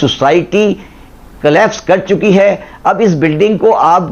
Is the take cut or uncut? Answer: uncut